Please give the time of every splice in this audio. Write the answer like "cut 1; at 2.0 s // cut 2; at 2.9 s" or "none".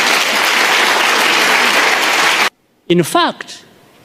cut 1; at 2.5 s